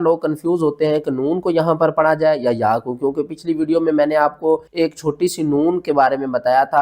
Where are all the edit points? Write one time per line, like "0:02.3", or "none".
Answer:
0:04.7